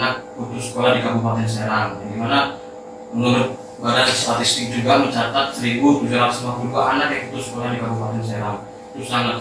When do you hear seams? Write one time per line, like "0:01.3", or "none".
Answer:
none